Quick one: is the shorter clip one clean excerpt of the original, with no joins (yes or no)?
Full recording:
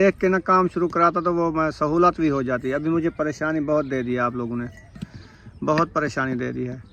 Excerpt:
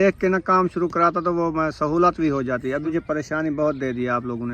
no